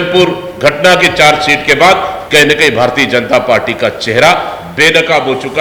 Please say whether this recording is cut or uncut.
uncut